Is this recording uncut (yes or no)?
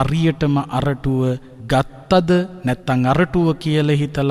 no